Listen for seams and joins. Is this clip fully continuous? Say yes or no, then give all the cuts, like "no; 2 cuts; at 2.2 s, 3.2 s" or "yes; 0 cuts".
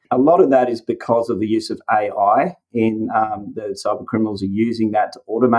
yes; 0 cuts